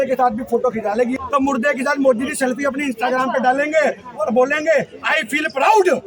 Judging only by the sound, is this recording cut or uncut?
cut